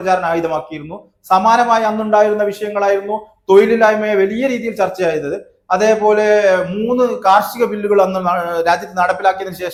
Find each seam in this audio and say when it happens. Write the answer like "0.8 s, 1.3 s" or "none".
none